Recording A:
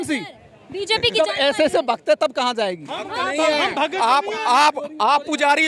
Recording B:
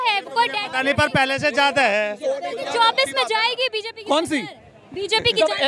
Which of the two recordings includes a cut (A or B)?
B